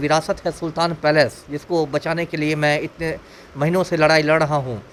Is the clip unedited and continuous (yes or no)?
yes